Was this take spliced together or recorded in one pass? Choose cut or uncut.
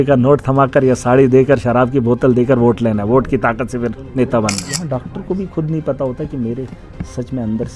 cut